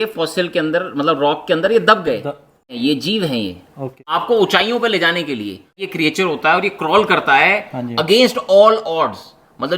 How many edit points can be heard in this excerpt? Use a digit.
3